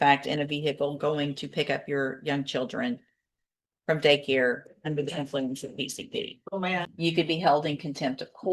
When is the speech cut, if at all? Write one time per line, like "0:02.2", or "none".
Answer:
0:06.9